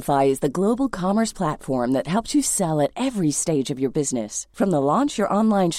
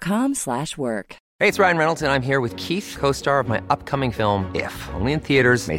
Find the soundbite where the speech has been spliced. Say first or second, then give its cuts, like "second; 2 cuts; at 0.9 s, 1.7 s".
second; 1 cut; at 1.2 s